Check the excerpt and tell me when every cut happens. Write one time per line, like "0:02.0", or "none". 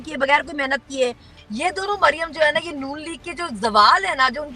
0:01.4